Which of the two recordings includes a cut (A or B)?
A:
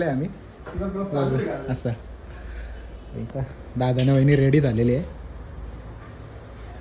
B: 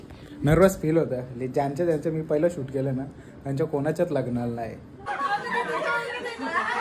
B